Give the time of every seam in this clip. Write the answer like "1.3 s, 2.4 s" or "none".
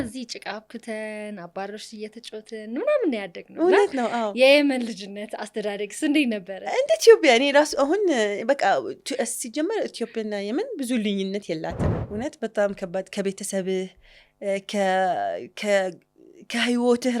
11.8 s